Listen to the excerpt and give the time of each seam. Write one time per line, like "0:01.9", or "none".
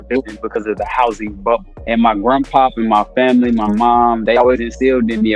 0:01.7